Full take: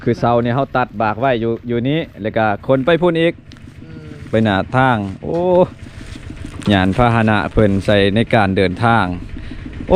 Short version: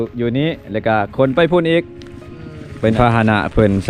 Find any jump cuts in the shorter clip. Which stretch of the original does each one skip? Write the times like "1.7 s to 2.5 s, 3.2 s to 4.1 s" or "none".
4.5 s to 7.0 s